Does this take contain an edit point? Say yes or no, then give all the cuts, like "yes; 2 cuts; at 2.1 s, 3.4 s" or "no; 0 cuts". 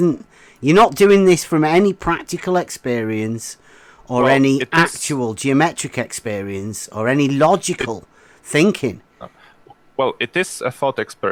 no; 0 cuts